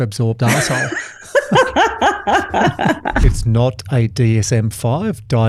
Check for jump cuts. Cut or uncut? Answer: cut